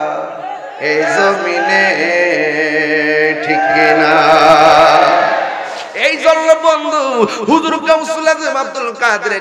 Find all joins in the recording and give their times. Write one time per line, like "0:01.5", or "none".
0:05.8